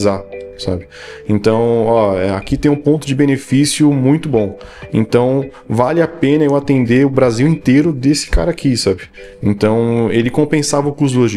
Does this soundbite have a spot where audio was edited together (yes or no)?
no